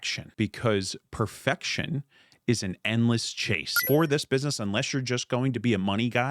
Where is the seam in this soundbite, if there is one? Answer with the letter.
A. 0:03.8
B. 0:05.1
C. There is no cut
A